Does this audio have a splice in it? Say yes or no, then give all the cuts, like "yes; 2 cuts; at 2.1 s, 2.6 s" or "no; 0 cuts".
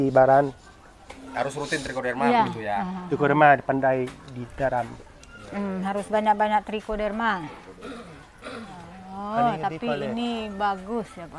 no; 0 cuts